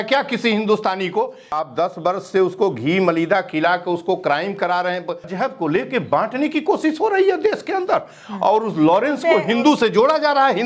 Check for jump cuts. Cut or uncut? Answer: cut